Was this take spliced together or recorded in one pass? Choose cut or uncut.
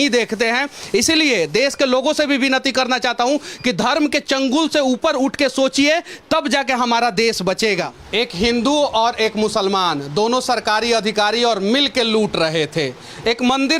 cut